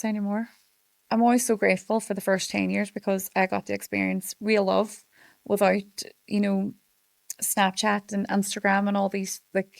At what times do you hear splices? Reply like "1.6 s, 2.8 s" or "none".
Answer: 0.9 s